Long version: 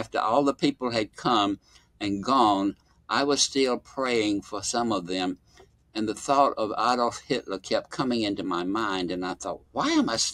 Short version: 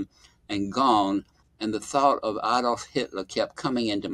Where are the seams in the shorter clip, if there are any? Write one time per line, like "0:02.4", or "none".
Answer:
0:01.4